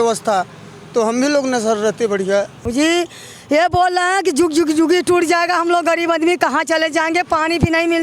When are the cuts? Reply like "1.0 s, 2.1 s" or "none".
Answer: 2.6 s